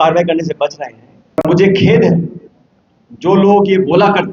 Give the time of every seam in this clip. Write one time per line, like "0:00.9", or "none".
0:01.4